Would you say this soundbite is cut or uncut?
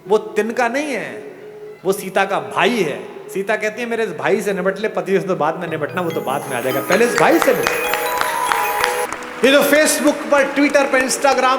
cut